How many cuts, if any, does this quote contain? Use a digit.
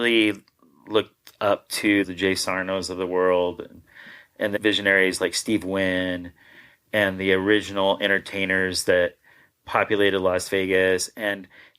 2